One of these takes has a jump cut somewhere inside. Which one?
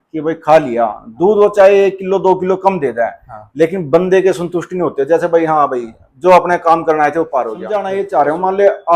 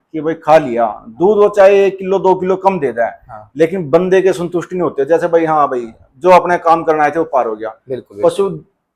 first; 1 cut; at 7.9 s

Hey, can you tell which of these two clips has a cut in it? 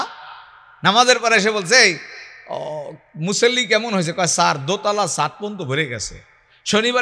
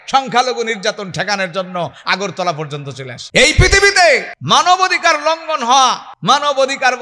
second; 3 cuts; at 3.1 s, 4.3 s, 6.1 s

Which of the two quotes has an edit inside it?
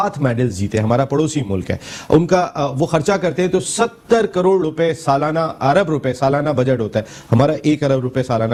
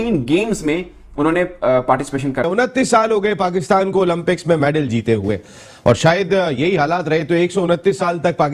second; 1 cut; at 2.5 s

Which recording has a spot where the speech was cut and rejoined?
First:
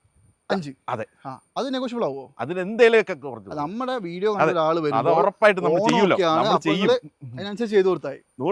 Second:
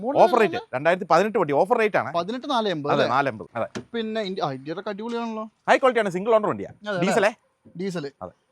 second; 1 cut; at 3.4 s

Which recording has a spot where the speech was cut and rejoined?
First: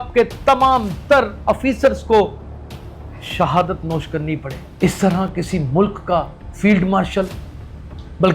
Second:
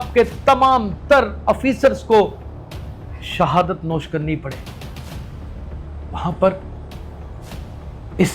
first; 1 cut; at 4.6 s

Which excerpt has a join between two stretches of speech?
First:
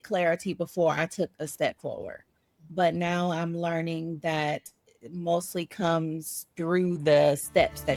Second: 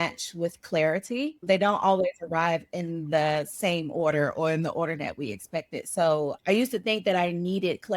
second; 1 cut; at 1.4 s

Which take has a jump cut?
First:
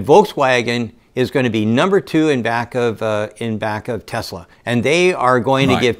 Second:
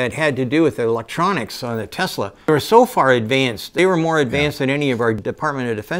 second; 3 cuts; at 2.5 s, 3.7 s, 5.2 s

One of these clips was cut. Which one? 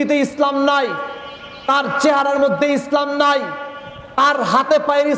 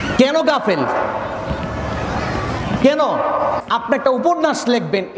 second; 1 cut; at 3.6 s

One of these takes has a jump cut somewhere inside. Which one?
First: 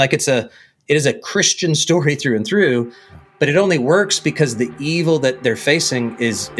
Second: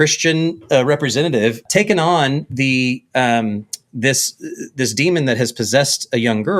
second; 1 cut; at 1.6 s

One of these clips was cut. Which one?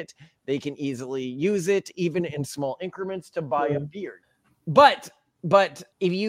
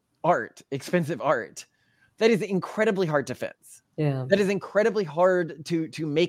first; 1 cut; at 4.4 s

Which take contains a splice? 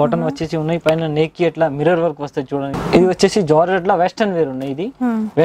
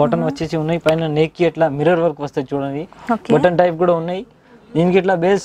first; 1 cut; at 2.7 s

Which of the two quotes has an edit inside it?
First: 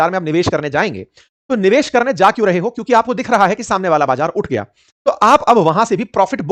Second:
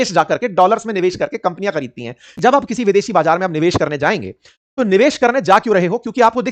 second; 1 cut; at 2.4 s

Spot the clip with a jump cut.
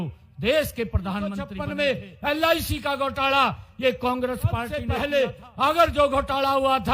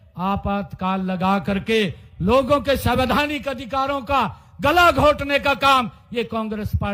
first; 2 cuts; at 1.6 s, 4.8 s

